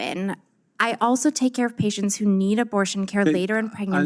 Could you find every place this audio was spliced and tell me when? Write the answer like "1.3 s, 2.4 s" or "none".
none